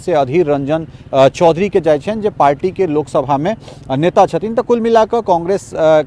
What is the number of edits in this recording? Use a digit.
0